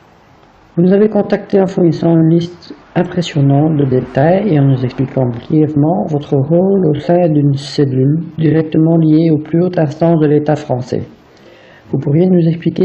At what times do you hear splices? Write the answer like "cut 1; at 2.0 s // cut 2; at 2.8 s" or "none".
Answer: cut 1; at 10.2 s

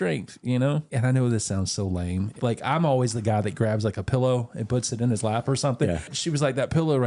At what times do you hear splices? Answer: cut 1; at 0.9 s // cut 2; at 2.3 s // cut 3; at 6.1 s

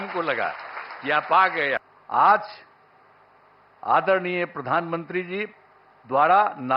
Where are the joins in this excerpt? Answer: cut 1; at 1.9 s

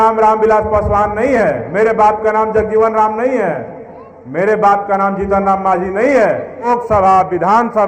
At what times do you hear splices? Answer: cut 1; at 6.7 s

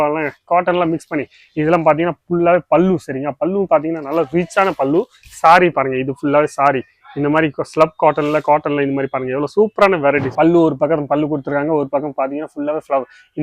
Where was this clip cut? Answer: cut 1; at 10.3 s

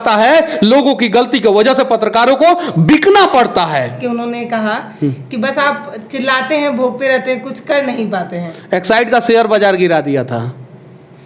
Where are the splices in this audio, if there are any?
cut 1; at 4.0 s

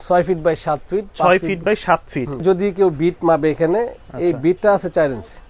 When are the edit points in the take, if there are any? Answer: cut 1; at 2.4 s

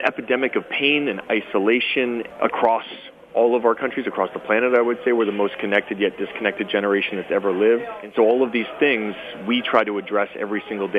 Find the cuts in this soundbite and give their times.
cut 1; at 2.3 s // cut 2; at 8.1 s

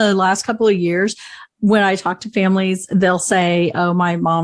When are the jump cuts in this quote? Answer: none

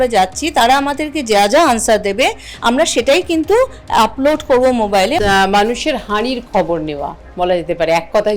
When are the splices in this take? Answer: cut 1; at 5.2 s

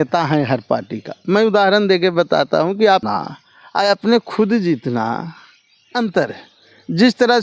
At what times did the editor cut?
cut 1; at 3.0 s

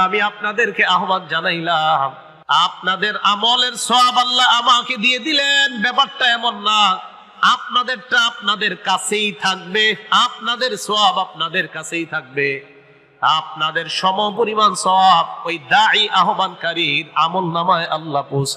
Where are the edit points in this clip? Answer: cut 1; at 2.3 s

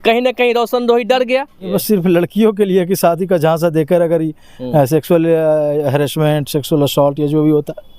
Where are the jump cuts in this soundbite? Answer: cut 1; at 1.7 s

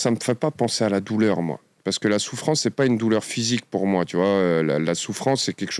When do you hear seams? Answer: none

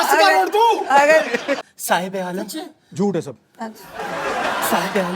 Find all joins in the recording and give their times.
cut 1; at 1.7 s

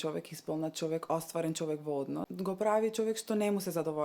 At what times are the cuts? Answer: cut 1; at 2.3 s

